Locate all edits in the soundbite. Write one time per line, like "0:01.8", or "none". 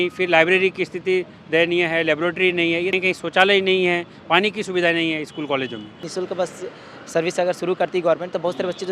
0:02.9
0:06.1